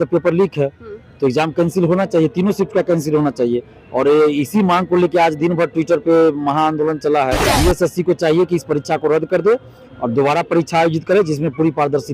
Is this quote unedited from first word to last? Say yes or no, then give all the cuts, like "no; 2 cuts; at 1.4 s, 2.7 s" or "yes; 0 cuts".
no; 1 cut; at 7.5 s